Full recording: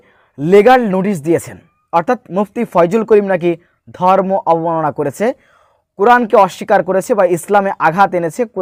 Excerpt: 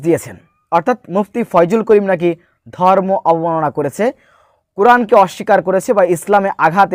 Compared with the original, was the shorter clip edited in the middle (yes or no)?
no